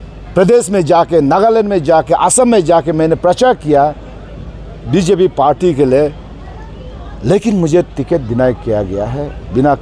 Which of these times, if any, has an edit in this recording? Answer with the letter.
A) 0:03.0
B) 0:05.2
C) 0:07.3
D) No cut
D